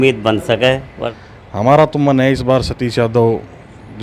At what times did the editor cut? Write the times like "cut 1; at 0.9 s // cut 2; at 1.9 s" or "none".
cut 1; at 1.0 s